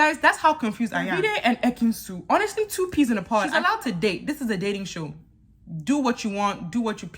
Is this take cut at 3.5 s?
yes; 2 cuts; at 1.1 s, 3.5 s

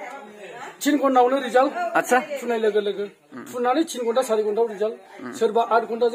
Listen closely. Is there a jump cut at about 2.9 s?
no; 0 cuts

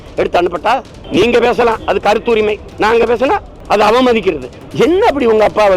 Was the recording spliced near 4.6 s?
yes; 4 cuts; at 1.0 s, 2.7 s, 3.5 s, 4.6 s

